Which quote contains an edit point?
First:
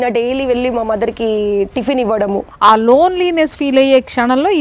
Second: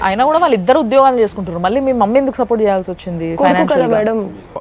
first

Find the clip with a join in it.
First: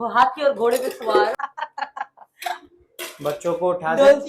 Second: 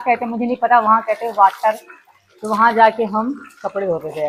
first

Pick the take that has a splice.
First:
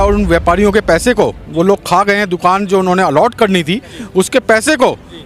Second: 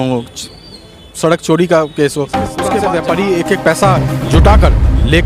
second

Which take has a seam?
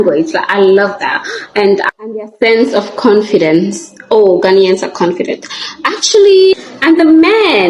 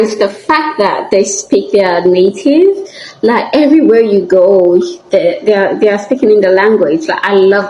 first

